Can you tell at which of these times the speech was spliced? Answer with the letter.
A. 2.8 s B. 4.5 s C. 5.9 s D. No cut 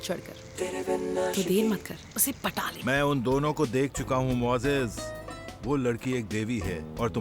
A